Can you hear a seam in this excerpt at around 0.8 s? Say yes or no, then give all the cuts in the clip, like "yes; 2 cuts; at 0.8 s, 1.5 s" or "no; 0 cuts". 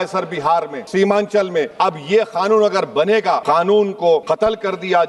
yes; 4 cuts; at 0.8 s, 1.7 s, 3.4 s, 4.2 s